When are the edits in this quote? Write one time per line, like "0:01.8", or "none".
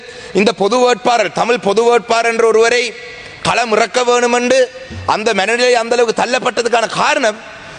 none